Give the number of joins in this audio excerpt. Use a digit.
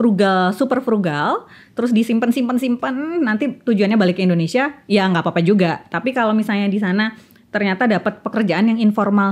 0